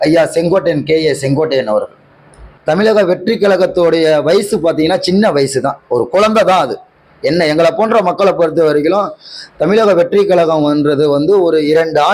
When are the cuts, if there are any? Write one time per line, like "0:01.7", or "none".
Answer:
0:02.5